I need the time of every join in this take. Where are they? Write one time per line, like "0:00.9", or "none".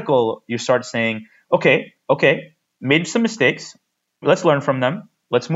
0:04.2